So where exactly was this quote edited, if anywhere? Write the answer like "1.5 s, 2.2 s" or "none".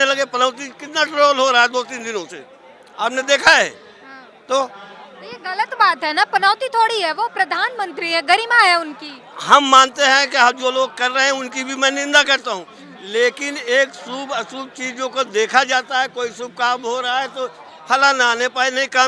none